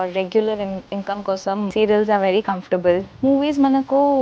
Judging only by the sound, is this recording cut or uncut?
cut